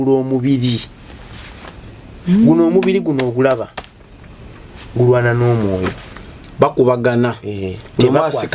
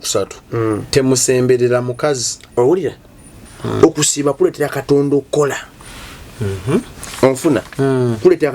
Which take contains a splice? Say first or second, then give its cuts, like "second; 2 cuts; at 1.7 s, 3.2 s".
second; 1 cut; at 3.5 s